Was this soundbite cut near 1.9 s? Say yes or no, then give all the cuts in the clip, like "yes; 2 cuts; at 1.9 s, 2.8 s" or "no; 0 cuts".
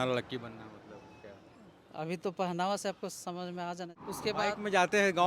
no; 1 cut; at 4.0 s